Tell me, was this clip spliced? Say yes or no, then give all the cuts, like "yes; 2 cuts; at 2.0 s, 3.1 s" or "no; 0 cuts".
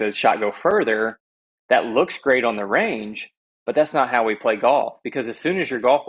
no; 0 cuts